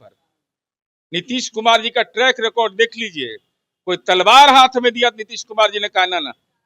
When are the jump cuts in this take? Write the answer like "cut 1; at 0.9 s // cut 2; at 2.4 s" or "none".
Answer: none